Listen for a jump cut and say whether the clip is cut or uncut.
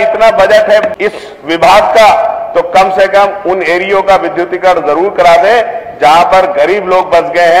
cut